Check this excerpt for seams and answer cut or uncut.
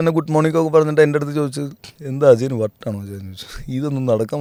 uncut